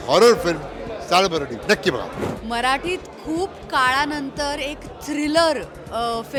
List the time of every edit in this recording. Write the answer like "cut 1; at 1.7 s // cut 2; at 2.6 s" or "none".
none